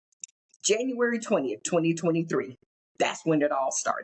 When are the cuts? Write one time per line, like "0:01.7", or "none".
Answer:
none